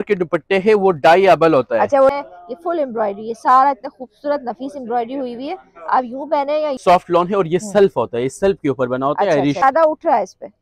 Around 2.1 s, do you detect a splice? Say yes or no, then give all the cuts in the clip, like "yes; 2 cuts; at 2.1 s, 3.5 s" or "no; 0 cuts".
yes; 3 cuts; at 2.1 s, 6.8 s, 9.6 s